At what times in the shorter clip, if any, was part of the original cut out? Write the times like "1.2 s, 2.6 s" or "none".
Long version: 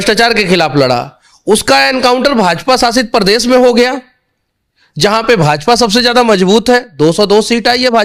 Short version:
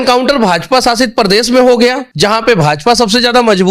2.1 s

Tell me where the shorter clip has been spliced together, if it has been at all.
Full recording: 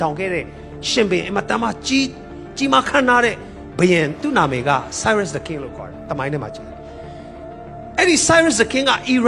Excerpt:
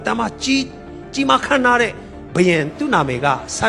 none

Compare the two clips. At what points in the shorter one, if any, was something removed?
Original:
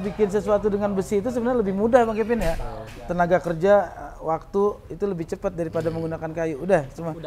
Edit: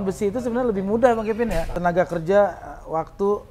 1.7 s

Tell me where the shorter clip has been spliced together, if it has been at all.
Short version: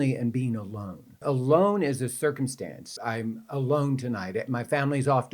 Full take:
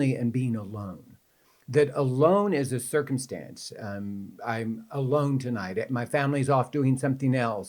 1.2 s, 2.9 s

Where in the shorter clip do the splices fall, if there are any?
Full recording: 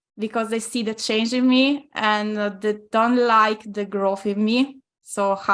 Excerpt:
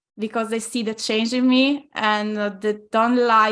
none

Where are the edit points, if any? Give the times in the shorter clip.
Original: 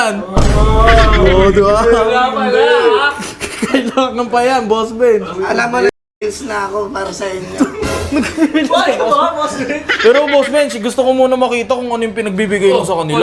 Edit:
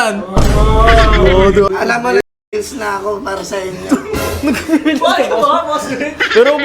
1.7 s

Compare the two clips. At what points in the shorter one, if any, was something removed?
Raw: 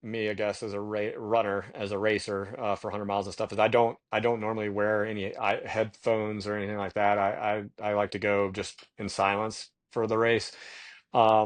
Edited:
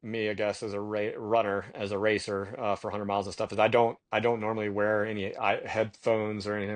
none

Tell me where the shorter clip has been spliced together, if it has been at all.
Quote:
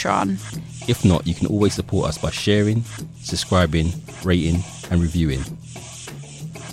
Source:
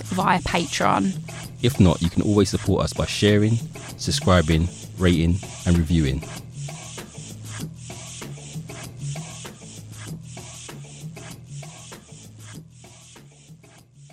5.5 s

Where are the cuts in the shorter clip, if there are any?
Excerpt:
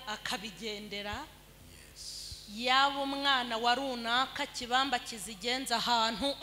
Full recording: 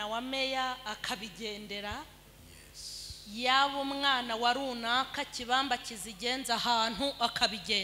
none

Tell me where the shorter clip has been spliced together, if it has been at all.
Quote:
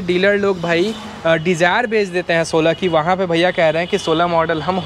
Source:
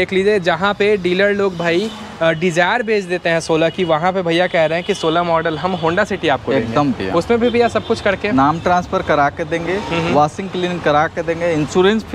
none

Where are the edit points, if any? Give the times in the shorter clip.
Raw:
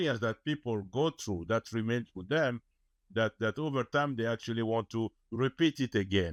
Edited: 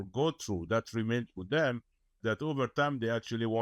2.2 s

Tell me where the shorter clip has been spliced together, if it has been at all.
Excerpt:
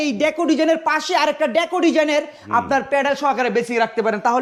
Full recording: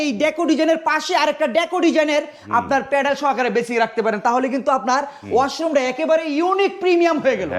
none

